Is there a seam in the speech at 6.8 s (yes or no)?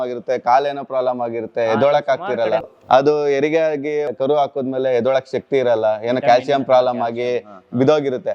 no